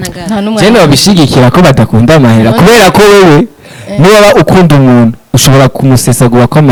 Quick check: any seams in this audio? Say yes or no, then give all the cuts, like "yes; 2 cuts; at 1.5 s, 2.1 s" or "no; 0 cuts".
no; 0 cuts